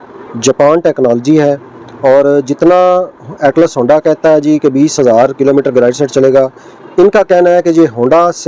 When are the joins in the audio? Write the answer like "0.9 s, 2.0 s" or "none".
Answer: none

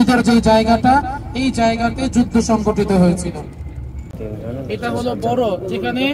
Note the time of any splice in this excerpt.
4.1 s

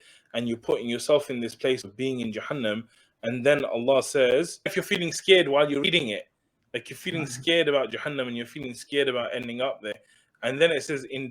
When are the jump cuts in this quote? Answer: 4.8 s

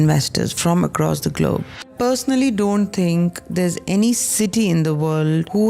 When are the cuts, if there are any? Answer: 1.9 s

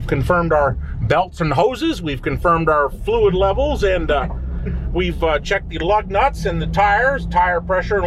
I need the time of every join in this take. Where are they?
none

